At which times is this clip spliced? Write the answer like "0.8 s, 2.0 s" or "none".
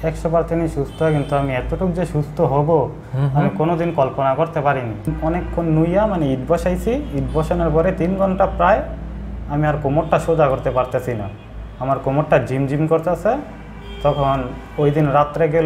5.1 s